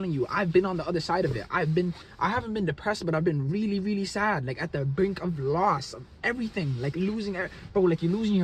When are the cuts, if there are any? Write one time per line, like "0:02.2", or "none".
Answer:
none